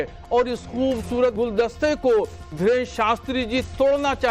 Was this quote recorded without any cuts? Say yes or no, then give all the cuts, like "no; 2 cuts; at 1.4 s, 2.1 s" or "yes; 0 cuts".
no; 2 cuts; at 1.4 s, 2.4 s